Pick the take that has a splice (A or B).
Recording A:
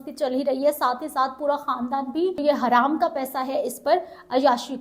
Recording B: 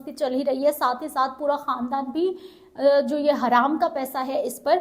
A